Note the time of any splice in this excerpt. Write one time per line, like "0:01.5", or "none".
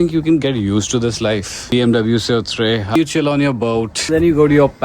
0:01.7
0:03.0
0:04.0